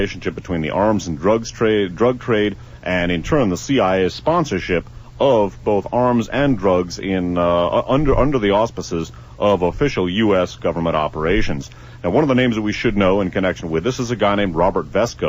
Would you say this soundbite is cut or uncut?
cut